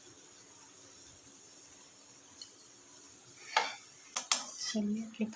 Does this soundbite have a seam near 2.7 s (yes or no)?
no